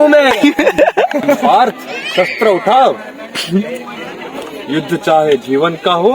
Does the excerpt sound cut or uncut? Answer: cut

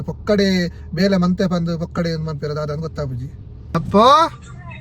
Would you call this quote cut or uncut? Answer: cut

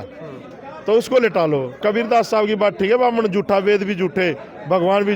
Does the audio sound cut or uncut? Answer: cut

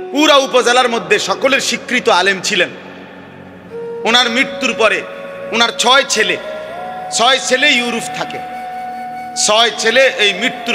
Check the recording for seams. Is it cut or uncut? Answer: cut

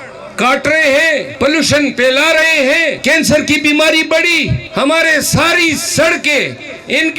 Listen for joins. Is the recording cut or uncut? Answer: cut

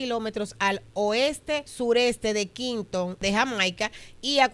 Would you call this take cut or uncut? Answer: cut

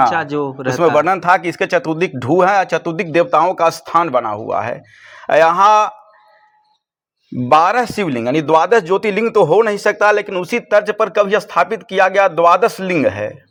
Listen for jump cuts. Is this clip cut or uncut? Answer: uncut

